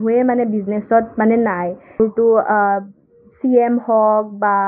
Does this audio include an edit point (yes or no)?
yes